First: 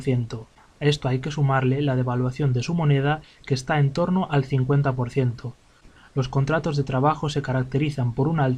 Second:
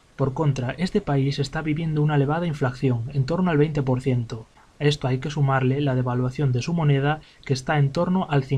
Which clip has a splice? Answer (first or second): second